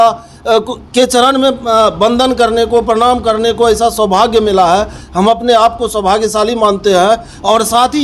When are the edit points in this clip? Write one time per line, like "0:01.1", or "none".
none